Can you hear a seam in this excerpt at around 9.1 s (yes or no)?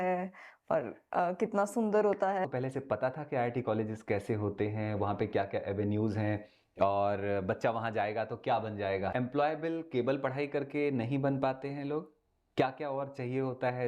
yes